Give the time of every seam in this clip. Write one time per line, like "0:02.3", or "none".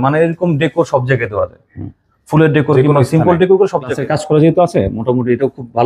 0:04.0